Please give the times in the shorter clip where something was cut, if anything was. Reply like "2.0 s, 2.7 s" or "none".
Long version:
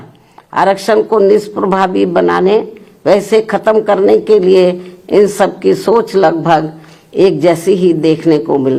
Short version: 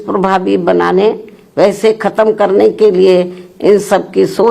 none